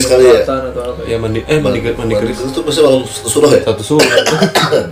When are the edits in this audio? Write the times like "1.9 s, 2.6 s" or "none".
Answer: none